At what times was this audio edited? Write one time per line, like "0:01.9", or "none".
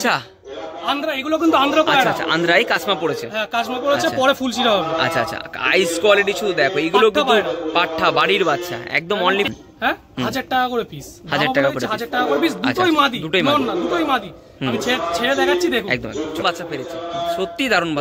0:09.5
0:16.4